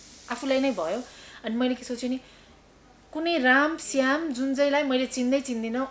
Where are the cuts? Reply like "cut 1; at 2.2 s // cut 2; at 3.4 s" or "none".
none